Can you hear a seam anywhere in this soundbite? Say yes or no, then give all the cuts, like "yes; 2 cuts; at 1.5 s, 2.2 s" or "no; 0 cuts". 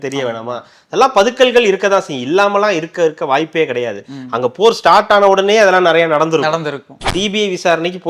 yes; 1 cut; at 6.9 s